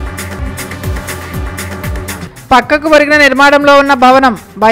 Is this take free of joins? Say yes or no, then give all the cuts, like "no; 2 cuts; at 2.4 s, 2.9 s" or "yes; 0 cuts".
no; 1 cut; at 2.2 s